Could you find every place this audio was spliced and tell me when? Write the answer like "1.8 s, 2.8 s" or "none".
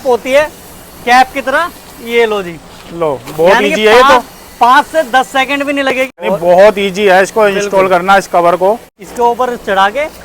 6.2 s, 9.0 s